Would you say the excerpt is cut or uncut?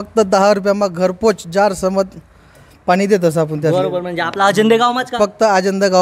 uncut